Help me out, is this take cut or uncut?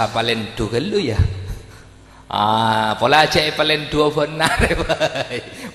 uncut